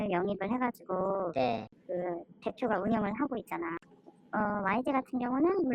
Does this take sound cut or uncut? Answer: cut